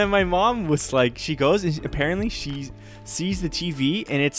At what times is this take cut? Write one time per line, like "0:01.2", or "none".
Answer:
0:01.2